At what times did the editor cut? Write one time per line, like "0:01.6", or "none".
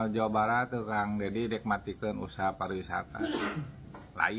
none